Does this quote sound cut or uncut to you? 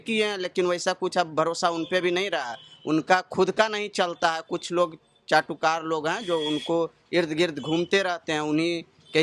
uncut